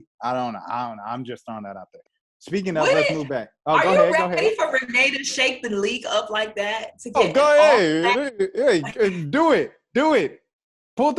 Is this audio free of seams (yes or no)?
yes